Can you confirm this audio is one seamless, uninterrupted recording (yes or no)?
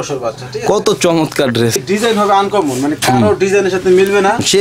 yes